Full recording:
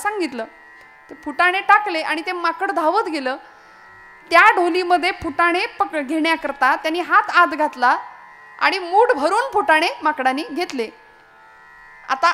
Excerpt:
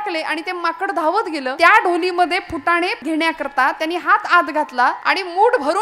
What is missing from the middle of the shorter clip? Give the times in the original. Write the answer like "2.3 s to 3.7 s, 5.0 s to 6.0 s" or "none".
3.3 s to 4.2 s, 5.7 s to 6.0 s, 8.0 s to 8.6 s